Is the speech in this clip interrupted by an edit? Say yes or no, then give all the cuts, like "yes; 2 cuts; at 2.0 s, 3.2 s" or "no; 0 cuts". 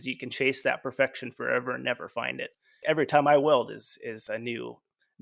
yes; 1 cut; at 2.8 s